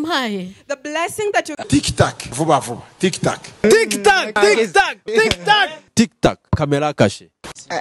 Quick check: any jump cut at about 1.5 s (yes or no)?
yes